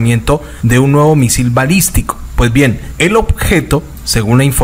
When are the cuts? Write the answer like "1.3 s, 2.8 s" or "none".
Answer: none

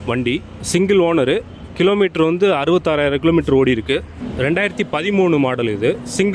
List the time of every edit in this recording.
4.2 s

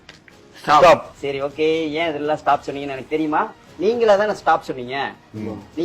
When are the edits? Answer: 1.1 s, 3.6 s

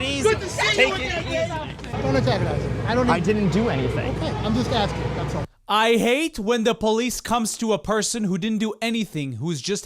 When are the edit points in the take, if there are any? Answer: 1.9 s

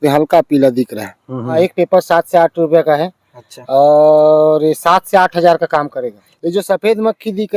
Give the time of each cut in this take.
1.5 s, 6.3 s

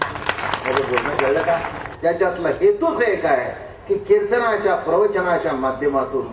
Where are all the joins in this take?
1.8 s

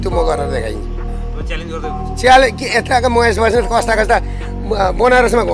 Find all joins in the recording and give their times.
none

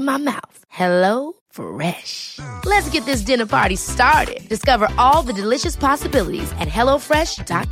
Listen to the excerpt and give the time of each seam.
none

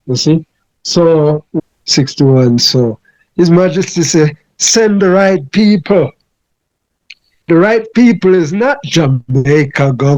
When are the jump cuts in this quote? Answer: 1.5 s

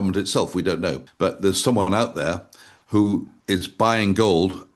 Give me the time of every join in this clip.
1.0 s, 3.3 s

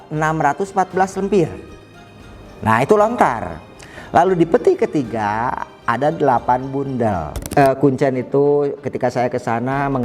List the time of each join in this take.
7.3 s

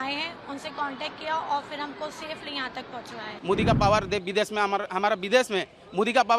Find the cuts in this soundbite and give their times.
3.3 s

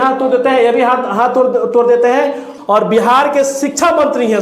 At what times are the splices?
2.5 s

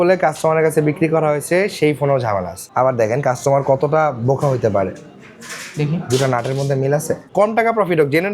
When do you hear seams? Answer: 2.6 s, 7.2 s

